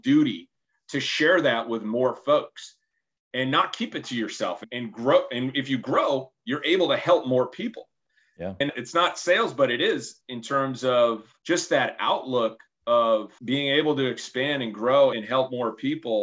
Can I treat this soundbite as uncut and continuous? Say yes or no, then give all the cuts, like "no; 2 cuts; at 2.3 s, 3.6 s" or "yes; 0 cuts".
no; 1 cut; at 8.7 s